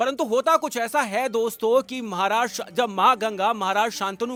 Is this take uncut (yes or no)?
yes